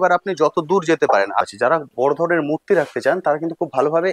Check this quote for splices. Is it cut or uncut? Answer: cut